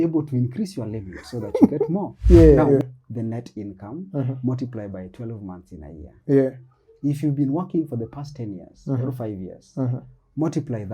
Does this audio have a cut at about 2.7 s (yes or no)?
yes